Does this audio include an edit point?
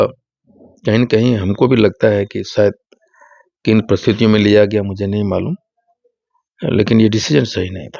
no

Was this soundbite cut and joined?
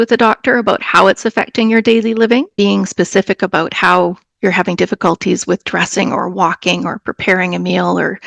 yes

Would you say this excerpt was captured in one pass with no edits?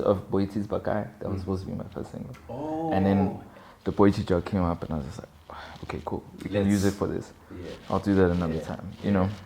yes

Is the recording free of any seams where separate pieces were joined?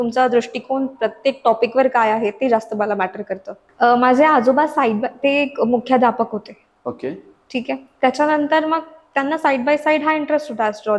no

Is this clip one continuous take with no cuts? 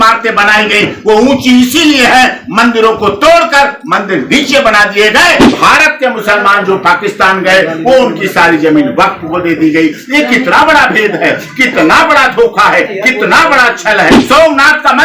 no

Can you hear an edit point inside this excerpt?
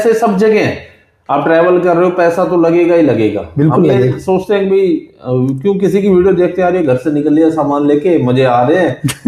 no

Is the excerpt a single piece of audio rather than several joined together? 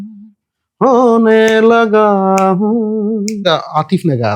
no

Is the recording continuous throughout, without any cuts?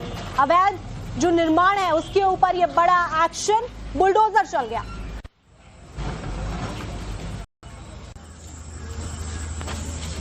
yes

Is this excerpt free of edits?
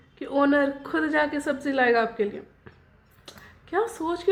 yes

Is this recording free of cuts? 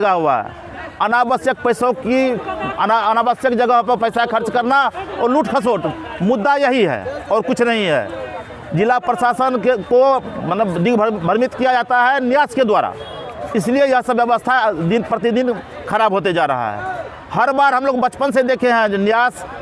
yes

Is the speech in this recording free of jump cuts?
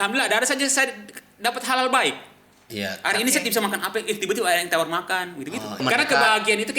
no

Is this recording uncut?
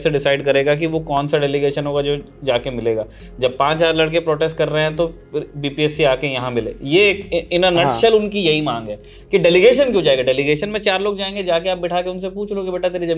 yes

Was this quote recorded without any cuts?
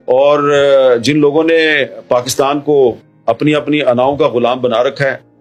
yes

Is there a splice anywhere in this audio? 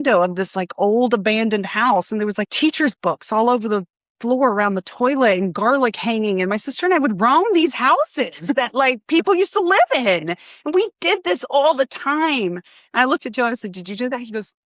yes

